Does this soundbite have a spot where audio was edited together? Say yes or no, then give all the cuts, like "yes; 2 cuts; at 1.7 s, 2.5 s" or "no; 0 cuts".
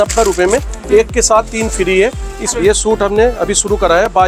yes; 1 cut; at 2.6 s